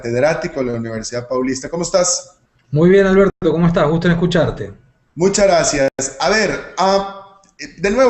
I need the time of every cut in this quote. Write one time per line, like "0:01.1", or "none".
0:03.2